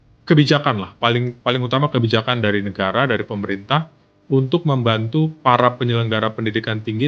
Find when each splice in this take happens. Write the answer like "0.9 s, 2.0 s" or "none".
none

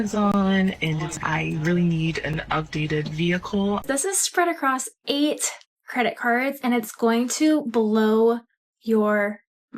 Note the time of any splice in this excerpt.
1.2 s, 3.8 s

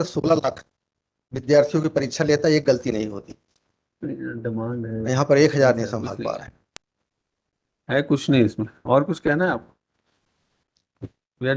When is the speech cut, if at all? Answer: none

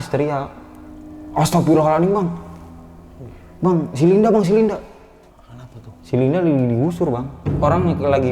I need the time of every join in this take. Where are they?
7.4 s

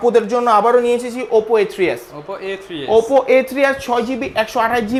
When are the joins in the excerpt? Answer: none

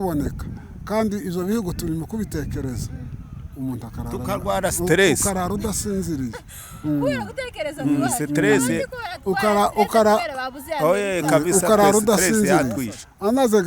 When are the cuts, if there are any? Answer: none

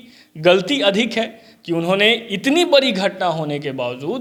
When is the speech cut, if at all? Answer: none

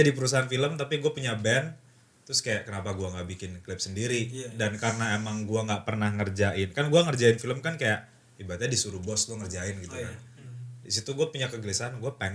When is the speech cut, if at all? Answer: none

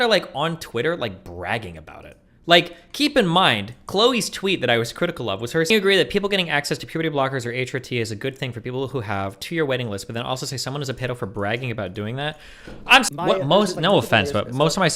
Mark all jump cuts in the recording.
5.7 s, 13.1 s

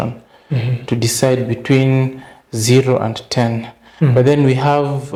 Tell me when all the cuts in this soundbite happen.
none

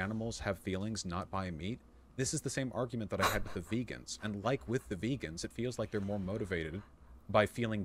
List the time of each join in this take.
4.6 s

